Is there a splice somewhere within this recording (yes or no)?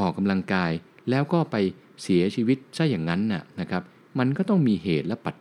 no